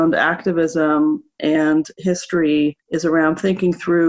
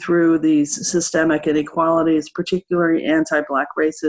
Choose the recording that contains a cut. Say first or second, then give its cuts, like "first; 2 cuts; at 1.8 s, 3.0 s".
first; 1 cut; at 2.9 s